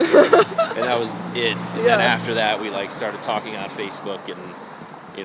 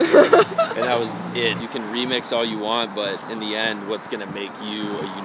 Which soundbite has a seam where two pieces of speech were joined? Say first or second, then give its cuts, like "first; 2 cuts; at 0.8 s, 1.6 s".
second; 1 cut; at 1.6 s